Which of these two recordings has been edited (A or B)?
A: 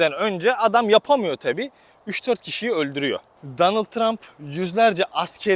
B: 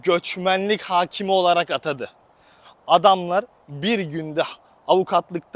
A